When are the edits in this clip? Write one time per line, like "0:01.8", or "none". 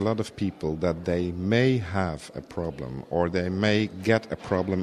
none

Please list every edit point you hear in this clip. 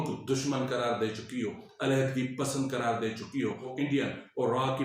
0:01.7
0:03.7

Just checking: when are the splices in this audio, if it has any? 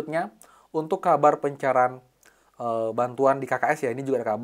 none

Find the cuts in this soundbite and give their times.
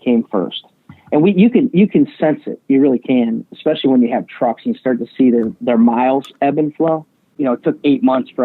0:07.2

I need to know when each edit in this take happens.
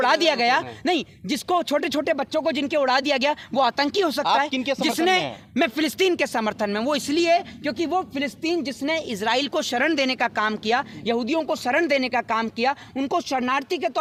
none

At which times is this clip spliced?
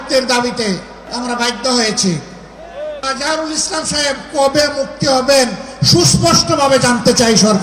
0:01.0
0:03.0

